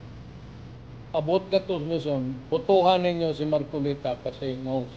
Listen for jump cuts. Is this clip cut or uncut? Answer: uncut